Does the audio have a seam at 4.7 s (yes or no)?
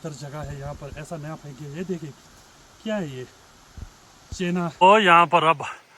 yes